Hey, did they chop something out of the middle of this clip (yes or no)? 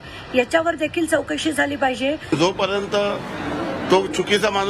yes